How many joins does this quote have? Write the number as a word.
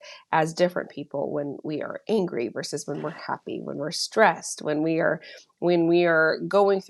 zero